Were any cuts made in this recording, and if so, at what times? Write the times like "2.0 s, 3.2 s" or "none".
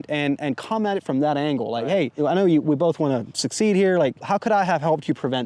2.1 s, 4.2 s